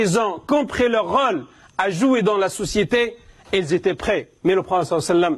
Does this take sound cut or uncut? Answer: cut